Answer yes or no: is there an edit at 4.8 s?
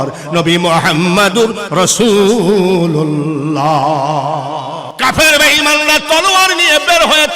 yes